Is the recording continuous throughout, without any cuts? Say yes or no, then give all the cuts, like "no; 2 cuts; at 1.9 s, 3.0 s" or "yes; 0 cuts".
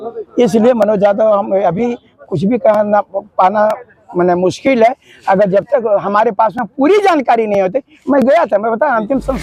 yes; 0 cuts